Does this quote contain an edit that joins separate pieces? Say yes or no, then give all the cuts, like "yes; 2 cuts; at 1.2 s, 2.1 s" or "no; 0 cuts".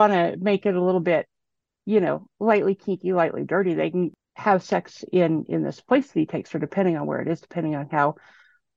yes; 1 cut; at 4.1 s